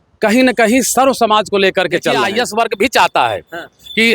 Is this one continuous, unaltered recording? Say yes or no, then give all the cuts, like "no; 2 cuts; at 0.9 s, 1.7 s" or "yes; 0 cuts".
no; 1 cut; at 2.3 s